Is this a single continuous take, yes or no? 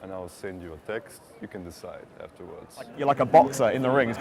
no